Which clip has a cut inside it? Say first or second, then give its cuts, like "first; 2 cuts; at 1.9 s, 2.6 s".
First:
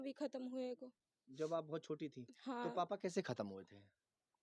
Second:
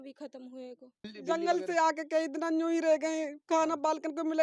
second; 1 cut; at 1.1 s